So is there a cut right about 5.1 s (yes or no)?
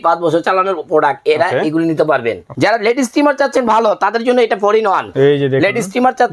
yes